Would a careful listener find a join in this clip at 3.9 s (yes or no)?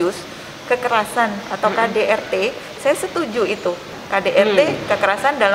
yes